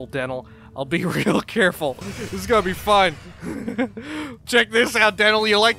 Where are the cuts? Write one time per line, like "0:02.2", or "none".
0:02.1
0:04.5